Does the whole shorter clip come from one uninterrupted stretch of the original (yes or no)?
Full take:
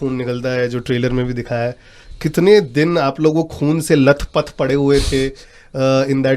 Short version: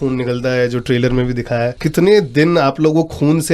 no